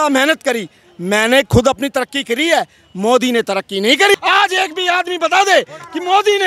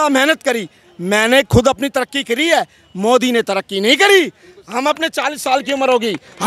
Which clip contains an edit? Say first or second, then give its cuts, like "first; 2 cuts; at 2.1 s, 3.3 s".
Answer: first; 1 cut; at 4.1 s